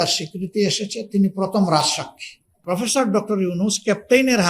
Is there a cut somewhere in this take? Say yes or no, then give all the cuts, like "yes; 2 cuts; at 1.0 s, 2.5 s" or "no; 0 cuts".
yes; 1 cut; at 2.5 s